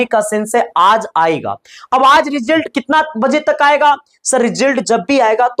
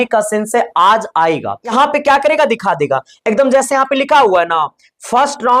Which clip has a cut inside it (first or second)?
second